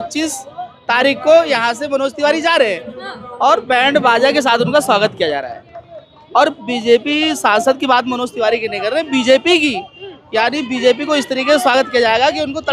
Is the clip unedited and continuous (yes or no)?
yes